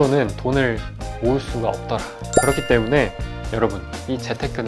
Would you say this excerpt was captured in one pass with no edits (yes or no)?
no